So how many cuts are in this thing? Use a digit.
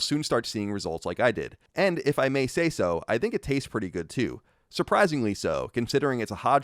1